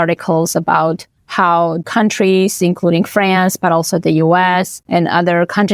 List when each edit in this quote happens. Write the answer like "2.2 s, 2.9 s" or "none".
1.8 s, 4.8 s